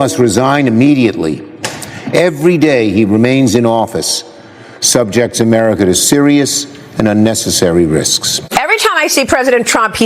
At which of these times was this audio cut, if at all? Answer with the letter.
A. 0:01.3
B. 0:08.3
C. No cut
B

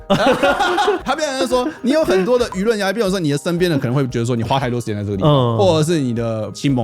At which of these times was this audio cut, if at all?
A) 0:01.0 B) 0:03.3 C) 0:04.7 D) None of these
A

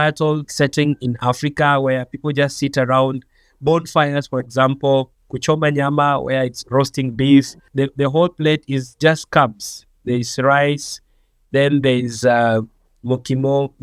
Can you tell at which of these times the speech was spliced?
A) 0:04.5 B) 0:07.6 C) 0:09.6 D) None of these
B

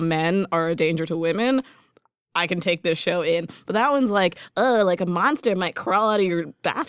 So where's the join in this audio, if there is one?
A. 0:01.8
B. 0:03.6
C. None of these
C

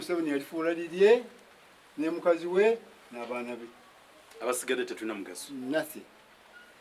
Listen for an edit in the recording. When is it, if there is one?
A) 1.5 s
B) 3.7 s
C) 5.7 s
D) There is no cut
D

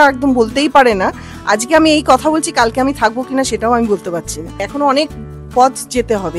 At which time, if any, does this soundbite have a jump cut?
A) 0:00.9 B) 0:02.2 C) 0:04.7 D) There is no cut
C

